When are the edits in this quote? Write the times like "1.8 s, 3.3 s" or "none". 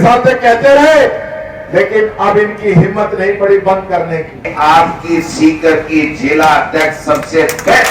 4.5 s

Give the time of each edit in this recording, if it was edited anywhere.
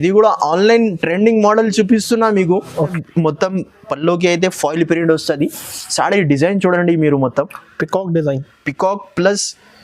2.9 s

